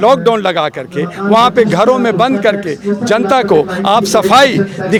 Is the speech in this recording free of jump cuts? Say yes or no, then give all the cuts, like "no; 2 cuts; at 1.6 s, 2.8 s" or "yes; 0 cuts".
yes; 0 cuts